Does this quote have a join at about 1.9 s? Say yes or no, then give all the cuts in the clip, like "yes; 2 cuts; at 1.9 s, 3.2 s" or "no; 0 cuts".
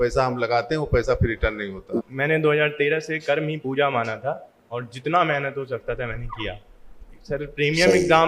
yes; 1 cut; at 1.9 s